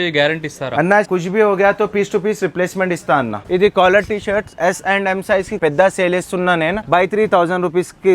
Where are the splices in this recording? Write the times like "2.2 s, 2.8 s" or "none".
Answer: 1.1 s, 3.4 s, 5.6 s, 6.8 s